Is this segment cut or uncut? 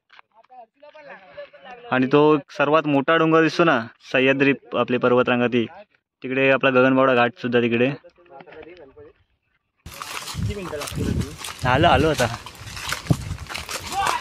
cut